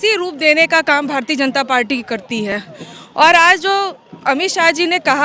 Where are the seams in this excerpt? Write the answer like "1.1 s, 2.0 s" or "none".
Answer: none